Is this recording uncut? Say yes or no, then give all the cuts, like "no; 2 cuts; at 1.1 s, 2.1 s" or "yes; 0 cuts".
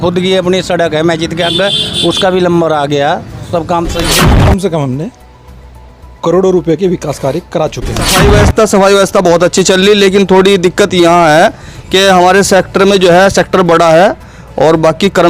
no; 2 cuts; at 4.2 s, 8.1 s